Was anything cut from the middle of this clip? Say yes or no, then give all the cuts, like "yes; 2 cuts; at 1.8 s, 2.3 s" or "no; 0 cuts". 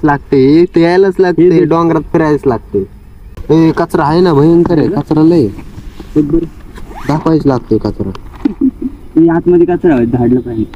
no; 0 cuts